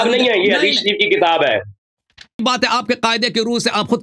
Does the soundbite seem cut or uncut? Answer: cut